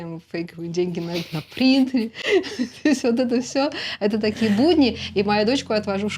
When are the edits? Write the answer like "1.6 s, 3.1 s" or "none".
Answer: none